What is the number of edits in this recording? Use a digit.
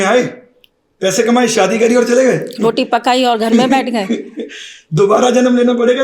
0